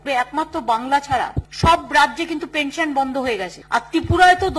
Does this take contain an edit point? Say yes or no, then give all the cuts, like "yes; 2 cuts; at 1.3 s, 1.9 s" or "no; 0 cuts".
yes; 2 cuts; at 1.4 s, 3.5 s